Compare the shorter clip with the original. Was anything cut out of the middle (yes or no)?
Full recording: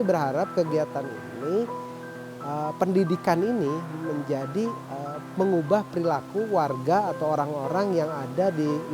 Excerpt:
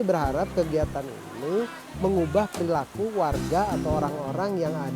yes